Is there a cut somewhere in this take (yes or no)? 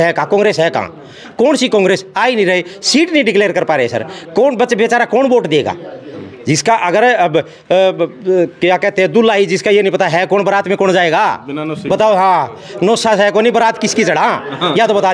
no